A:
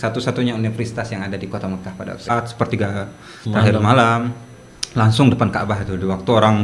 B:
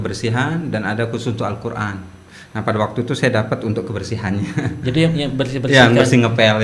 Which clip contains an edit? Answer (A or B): A